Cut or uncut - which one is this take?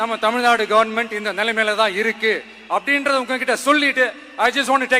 uncut